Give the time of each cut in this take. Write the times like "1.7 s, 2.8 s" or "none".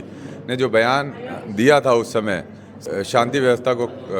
2.8 s